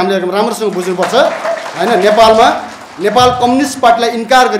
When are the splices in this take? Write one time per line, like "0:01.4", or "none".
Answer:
none

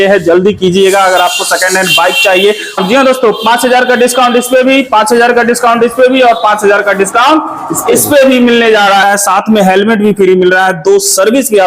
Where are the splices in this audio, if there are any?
0:02.8
0:09.0

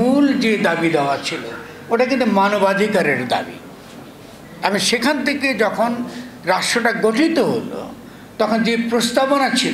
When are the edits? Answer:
none

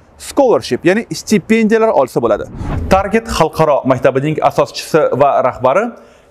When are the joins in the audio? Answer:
0:02.6

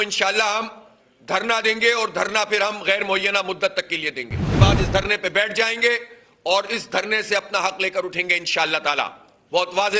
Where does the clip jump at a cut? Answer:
0:04.6

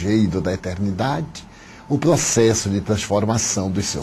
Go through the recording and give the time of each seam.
0:03.0

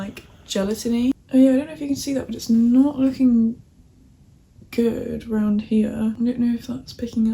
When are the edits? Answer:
0:01.2

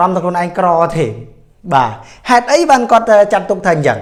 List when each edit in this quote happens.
none

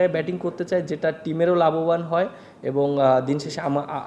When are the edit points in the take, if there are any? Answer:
none

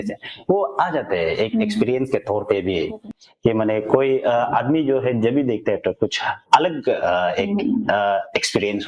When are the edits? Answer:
0:03.1

